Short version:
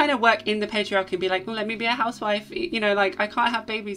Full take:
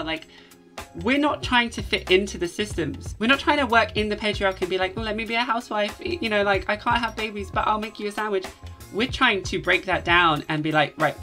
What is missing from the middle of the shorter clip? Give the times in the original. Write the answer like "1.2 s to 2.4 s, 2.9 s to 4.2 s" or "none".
none